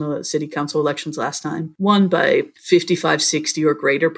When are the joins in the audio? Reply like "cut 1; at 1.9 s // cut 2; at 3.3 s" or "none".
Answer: cut 1; at 1.7 s // cut 2; at 2.6 s